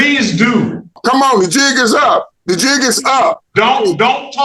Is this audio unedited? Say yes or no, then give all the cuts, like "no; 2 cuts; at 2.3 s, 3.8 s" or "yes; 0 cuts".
no; 3 cuts; at 1.0 s, 2.3 s, 3.4 s